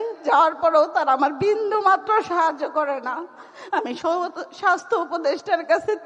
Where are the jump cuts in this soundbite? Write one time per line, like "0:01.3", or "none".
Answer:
none